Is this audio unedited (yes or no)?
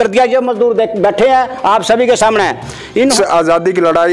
no